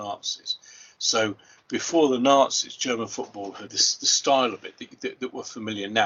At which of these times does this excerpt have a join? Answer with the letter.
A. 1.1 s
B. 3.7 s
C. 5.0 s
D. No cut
B